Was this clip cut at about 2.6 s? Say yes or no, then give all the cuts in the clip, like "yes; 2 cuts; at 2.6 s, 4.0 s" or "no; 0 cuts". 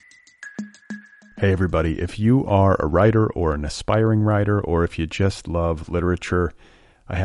no; 1 cut; at 0.9 s